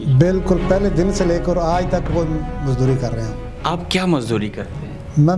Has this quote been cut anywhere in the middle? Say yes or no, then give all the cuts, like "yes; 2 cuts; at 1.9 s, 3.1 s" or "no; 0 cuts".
no; 0 cuts